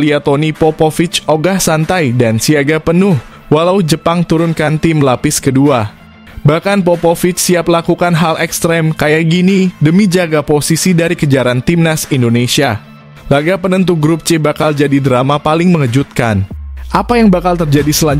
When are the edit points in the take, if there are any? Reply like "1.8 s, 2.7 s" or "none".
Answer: none